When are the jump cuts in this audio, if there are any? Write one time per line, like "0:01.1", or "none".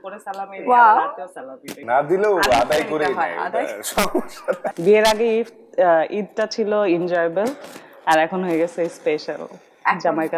0:01.8
0:04.6